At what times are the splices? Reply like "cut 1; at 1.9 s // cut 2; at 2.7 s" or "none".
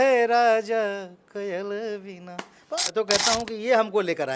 cut 1; at 2.7 s